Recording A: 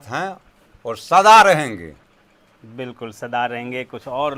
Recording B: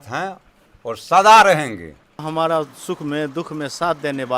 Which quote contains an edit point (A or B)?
B